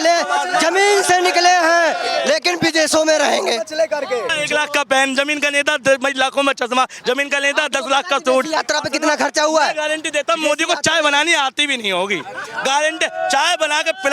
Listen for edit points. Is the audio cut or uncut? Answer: cut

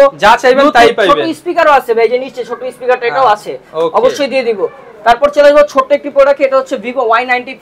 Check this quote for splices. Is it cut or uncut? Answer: uncut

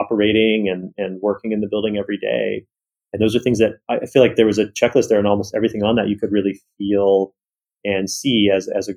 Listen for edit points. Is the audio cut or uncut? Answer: uncut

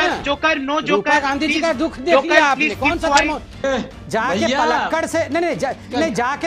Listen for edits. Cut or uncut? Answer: cut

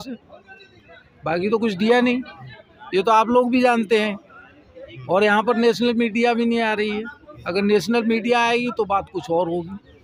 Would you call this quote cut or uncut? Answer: uncut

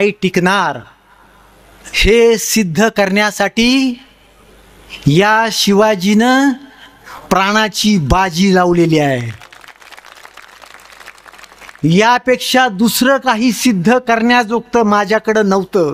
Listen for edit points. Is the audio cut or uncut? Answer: uncut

